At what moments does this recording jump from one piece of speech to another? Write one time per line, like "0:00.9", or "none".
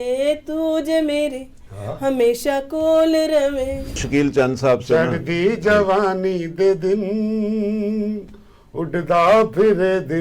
0:04.0